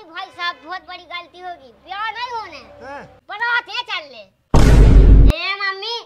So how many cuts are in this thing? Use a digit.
2